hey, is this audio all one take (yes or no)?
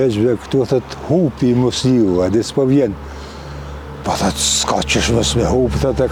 yes